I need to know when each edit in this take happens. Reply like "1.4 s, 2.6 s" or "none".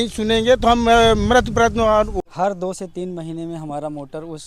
2.1 s

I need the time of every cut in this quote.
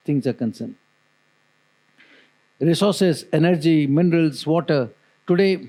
none

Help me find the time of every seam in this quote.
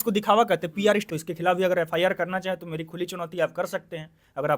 1.1 s

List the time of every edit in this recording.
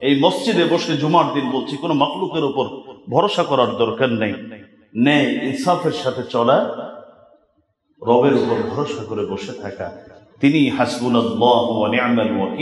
none

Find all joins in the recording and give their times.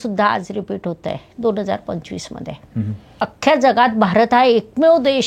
3.1 s

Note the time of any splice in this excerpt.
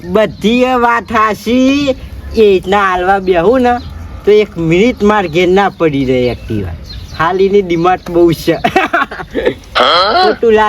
none

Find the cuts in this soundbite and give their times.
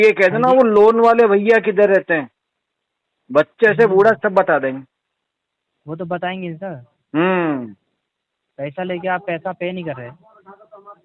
none

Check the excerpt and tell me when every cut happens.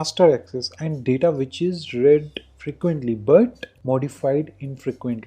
3.7 s

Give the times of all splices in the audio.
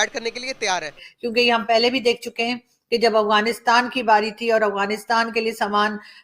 1.0 s

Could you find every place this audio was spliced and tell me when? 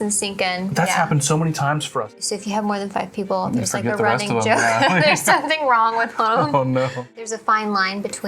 2.1 s, 7.2 s

